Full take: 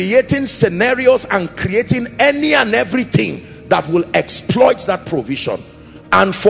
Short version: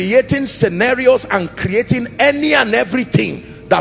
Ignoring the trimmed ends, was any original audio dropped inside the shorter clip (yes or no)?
no